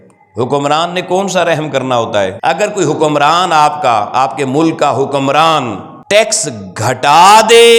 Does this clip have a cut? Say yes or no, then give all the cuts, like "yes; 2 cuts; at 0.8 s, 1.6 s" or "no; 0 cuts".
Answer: yes; 1 cut; at 2.4 s